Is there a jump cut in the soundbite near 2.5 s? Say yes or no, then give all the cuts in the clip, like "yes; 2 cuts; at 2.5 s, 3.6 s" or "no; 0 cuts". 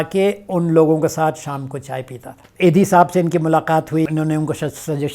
yes; 2 cuts; at 2.5 s, 4.1 s